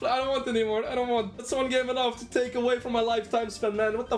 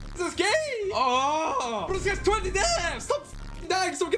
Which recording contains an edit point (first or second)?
second